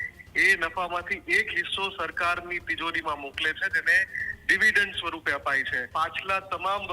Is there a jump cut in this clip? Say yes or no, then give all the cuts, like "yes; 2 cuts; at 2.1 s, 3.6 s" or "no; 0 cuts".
yes; 1 cut; at 5.8 s